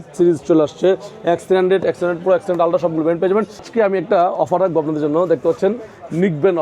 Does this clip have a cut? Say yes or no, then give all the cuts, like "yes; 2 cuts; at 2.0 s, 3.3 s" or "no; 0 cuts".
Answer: yes; 1 cut; at 3.7 s